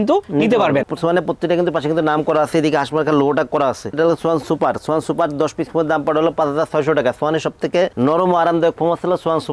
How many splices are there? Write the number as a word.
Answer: two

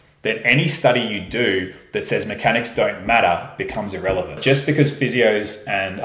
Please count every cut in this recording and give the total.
one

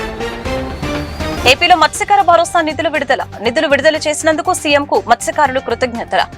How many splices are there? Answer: one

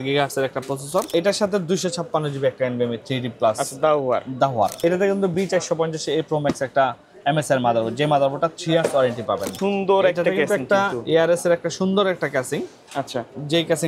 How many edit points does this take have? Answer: three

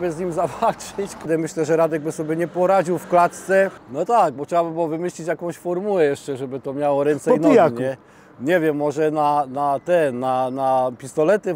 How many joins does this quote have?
two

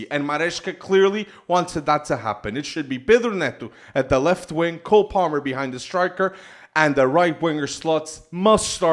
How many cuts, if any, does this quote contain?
zero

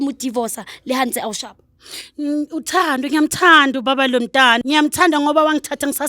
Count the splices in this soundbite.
one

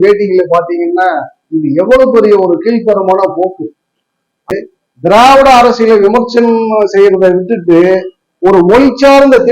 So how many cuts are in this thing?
one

